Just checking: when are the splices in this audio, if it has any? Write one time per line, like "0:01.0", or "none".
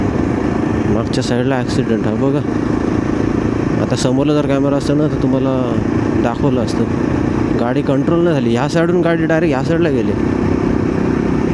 none